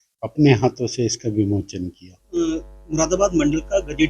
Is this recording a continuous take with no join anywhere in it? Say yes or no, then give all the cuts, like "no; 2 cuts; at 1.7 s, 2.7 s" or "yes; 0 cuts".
no; 1 cut; at 2.3 s